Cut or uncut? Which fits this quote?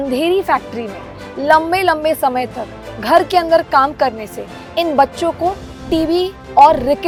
uncut